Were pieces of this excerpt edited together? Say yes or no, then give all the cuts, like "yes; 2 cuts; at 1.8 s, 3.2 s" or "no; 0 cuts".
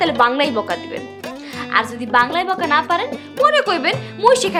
no; 0 cuts